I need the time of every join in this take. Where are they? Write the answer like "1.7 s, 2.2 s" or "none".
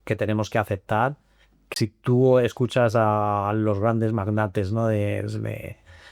1.7 s